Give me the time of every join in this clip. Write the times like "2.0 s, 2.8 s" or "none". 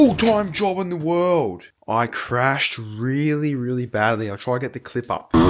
1.8 s